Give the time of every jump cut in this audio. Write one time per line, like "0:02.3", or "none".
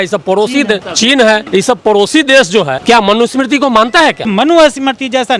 0:00.9
0:01.4
0:02.8
0:04.3